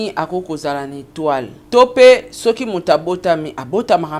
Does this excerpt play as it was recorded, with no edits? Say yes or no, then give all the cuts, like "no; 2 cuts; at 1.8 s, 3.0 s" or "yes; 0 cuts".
no; 1 cut; at 1.6 s